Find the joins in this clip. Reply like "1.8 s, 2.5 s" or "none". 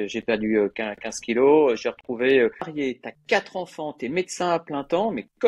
2.7 s